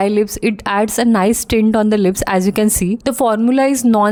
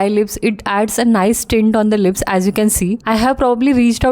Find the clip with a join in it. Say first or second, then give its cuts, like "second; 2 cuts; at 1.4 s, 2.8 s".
second; 1 cut; at 3.0 s